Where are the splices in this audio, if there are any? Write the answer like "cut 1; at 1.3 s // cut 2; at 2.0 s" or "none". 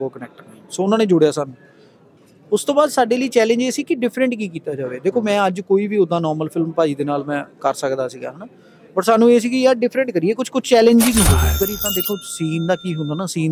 cut 1; at 11.6 s

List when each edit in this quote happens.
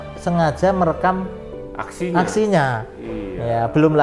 none

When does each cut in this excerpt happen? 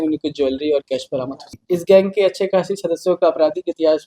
cut 1; at 1.5 s

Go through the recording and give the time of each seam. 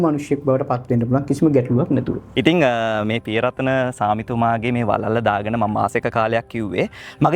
cut 1; at 2.2 s

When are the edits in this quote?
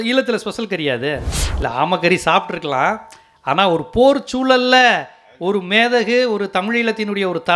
cut 1; at 1.4 s

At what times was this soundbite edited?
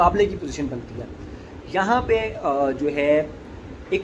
none

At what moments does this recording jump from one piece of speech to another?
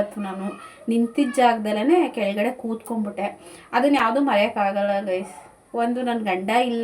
none

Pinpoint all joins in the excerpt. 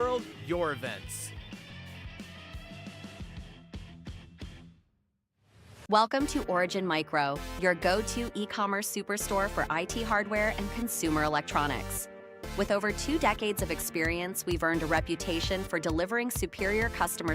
cut 1; at 5.8 s

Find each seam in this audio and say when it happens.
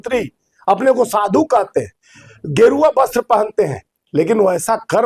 none

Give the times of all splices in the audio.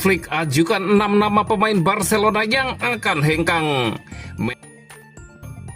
cut 1; at 4.5 s

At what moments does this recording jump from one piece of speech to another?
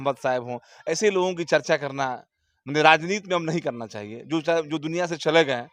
none

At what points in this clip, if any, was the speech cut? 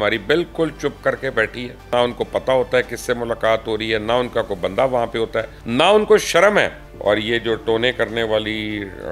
cut 1; at 1.9 s // cut 2; at 5.6 s // cut 3; at 6.8 s

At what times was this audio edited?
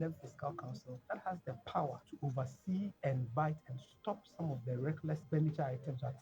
cut 1; at 0.9 s // cut 2; at 2.1 s // cut 3; at 3.0 s // cut 4; at 5.2 s

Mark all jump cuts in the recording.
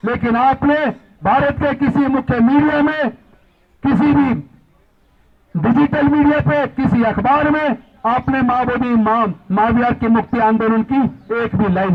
none

